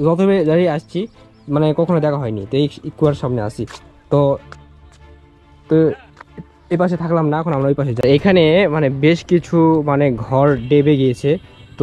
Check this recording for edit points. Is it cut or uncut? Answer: cut